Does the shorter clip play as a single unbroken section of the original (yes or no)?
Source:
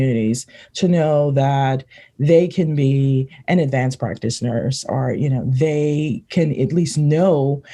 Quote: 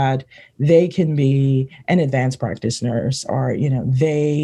yes